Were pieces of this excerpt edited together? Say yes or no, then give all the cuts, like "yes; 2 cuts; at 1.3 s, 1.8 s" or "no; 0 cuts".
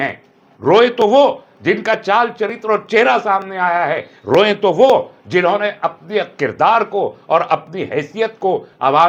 no; 0 cuts